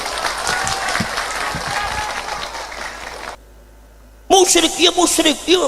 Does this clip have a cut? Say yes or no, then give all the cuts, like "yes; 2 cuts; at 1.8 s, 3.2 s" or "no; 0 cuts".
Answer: yes; 1 cut; at 3.3 s